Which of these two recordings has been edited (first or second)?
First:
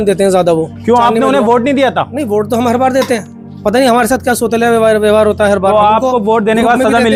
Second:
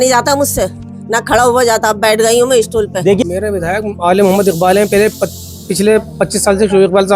second